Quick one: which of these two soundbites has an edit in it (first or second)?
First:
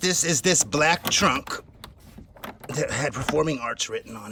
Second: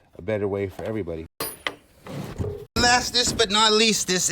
second